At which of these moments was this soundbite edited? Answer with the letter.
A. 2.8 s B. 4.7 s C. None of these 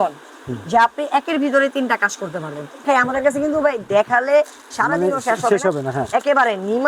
A